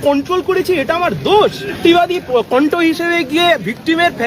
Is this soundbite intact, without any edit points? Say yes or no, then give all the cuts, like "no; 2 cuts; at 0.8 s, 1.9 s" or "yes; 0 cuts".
no; 1 cut; at 1.8 s